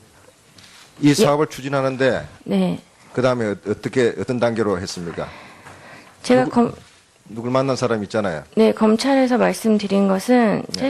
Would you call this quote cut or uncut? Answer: cut